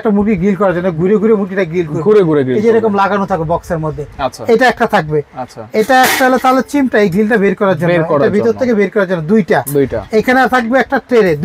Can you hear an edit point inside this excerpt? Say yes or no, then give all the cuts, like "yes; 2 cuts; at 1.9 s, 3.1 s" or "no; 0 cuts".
no; 0 cuts